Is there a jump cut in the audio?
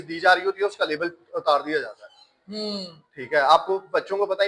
no; 0 cuts

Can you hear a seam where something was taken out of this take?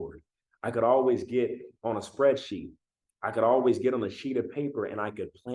no; 0 cuts

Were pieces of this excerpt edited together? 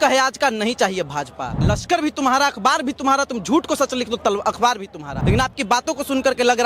yes; 2 cuts; at 1.6 s, 5.1 s

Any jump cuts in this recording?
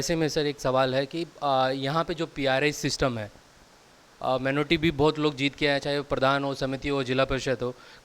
no; 0 cuts

